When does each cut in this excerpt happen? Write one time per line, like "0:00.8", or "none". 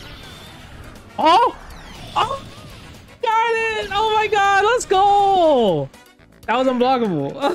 none